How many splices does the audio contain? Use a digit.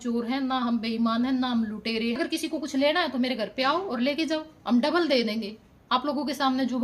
1